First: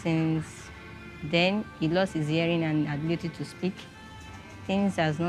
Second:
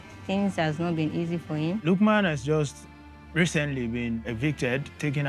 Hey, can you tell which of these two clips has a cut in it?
second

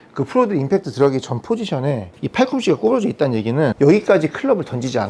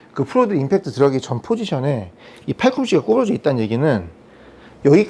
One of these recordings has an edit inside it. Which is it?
first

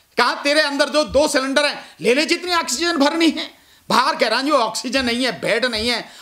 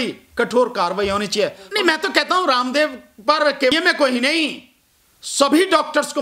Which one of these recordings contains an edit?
second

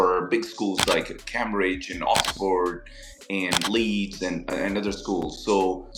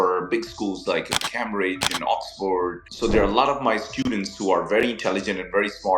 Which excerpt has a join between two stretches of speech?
second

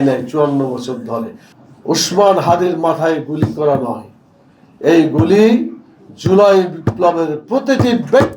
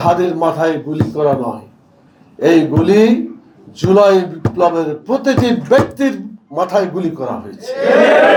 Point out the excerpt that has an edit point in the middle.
first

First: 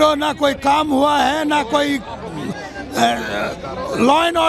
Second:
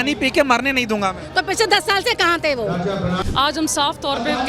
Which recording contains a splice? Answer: second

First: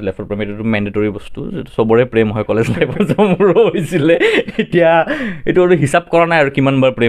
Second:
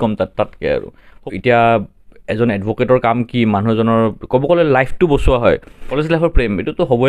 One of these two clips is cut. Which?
second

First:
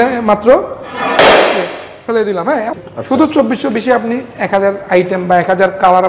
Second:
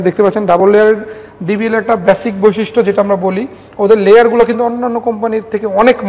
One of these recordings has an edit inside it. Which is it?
first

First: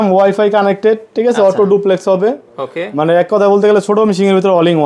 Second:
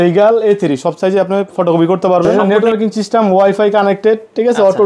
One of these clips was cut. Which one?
second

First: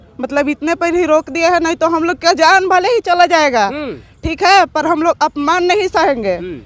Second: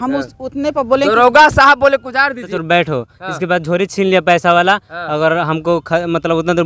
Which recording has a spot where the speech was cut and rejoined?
second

